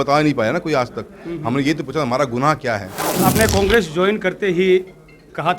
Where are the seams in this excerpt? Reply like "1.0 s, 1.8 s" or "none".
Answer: 3.0 s